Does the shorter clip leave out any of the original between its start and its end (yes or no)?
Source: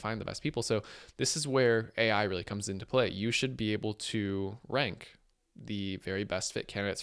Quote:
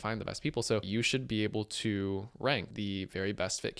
yes